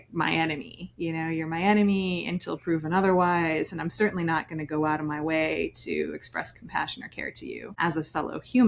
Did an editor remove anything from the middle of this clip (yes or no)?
yes